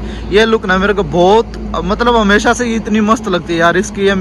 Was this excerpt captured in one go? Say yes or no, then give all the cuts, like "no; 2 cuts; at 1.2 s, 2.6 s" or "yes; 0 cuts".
yes; 0 cuts